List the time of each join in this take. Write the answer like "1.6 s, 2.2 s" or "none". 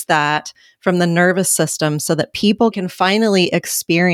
2.8 s